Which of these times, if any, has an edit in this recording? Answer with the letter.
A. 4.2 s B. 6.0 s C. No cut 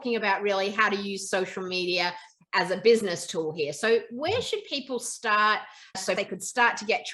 B